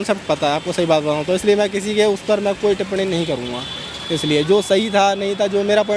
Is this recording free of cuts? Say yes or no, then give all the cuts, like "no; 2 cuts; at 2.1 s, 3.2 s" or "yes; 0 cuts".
yes; 0 cuts